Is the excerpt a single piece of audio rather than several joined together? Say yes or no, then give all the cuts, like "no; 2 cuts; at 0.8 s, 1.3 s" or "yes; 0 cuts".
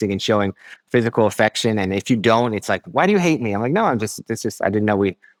yes; 0 cuts